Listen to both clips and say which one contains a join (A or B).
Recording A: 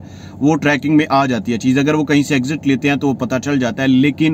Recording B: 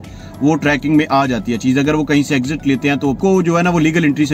B